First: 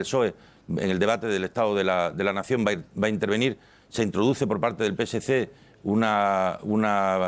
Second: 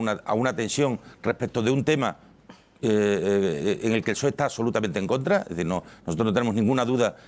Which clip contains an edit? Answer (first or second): second